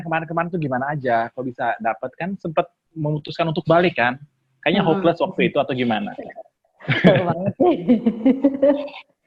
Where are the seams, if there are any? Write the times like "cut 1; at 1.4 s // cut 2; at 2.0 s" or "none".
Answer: none